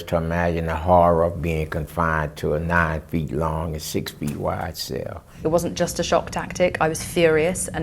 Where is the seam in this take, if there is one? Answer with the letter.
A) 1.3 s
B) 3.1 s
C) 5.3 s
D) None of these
C